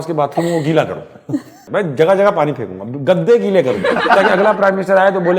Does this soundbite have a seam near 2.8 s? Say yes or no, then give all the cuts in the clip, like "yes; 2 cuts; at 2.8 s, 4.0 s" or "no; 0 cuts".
no; 2 cuts; at 1.6 s, 4.1 s